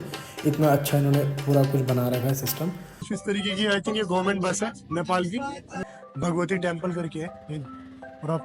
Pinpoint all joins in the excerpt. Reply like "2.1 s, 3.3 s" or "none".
3.1 s, 5.8 s